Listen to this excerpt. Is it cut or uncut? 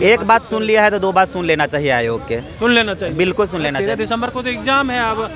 uncut